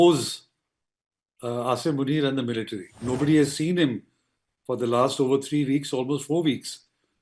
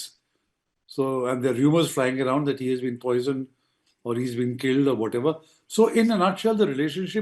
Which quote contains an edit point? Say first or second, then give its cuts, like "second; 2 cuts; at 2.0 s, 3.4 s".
first; 1 cut; at 2.9 s